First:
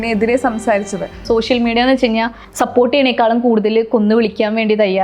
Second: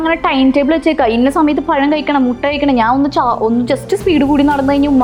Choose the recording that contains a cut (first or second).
first